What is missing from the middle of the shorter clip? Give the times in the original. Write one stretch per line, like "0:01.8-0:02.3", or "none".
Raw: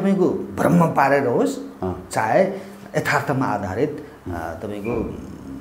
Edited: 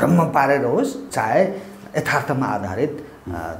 0:01.7-0:02.0

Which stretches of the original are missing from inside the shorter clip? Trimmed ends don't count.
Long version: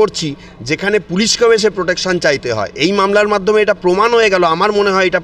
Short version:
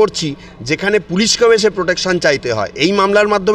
none

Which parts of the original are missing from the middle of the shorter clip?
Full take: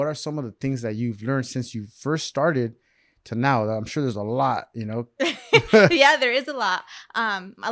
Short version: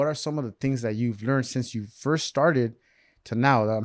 none

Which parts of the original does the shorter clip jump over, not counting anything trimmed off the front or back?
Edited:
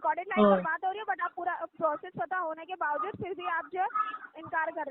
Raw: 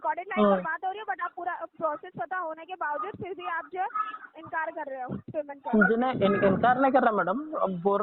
none

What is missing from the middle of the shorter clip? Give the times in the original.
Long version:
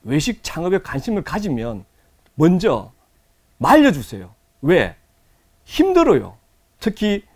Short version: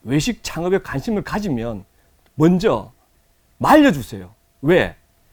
none

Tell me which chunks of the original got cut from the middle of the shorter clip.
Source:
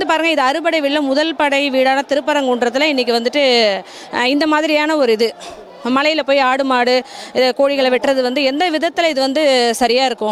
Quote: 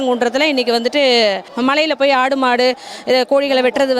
0:03.9-0:05.7

